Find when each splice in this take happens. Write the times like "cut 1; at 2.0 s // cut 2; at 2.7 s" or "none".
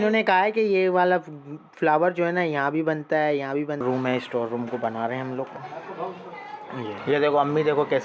cut 1; at 3.8 s // cut 2; at 7.0 s